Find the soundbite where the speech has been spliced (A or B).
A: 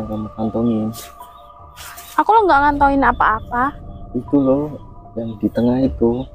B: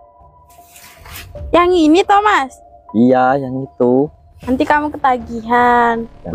B